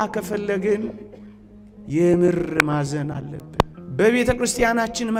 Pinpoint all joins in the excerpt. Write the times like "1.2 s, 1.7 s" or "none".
none